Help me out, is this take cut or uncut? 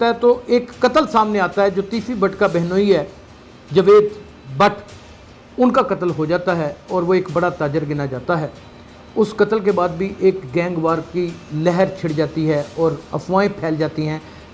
uncut